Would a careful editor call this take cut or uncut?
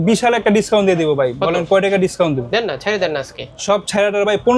uncut